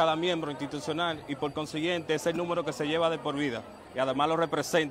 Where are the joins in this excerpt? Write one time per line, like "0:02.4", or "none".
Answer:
0:01.8